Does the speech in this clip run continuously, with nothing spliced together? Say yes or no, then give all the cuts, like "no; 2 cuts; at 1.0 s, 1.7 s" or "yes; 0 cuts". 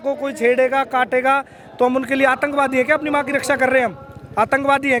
yes; 0 cuts